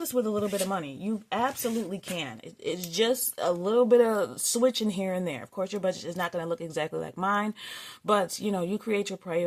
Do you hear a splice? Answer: no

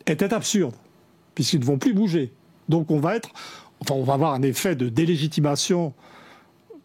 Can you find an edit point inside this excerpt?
no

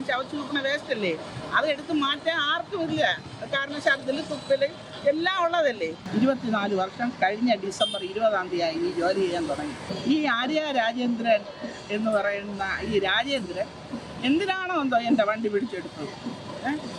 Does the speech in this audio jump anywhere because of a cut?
yes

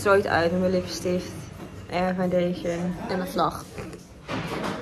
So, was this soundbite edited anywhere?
no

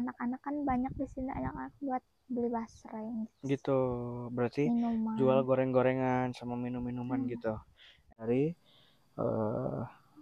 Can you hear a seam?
yes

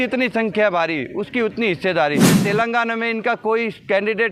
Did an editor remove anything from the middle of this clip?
yes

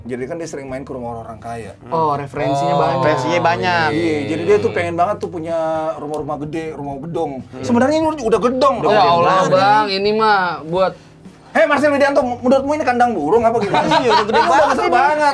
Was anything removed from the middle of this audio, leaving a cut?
no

